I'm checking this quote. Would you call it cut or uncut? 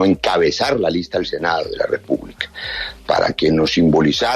cut